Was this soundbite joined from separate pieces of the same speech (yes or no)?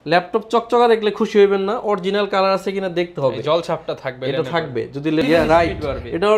yes